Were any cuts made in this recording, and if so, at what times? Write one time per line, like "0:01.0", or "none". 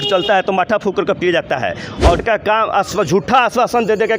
0:02.2